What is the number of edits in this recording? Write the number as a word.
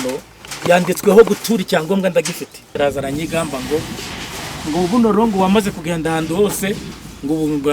one